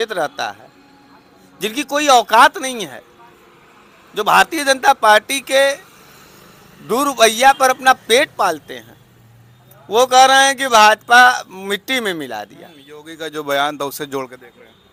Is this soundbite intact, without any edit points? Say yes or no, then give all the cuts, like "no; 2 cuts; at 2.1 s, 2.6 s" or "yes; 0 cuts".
yes; 0 cuts